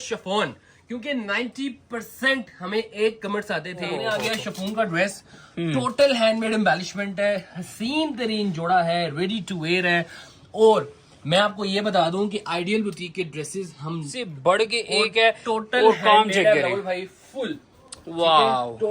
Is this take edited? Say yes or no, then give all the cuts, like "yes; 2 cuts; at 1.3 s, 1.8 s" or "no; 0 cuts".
yes; 2 cuts; at 4.0 s, 14.2 s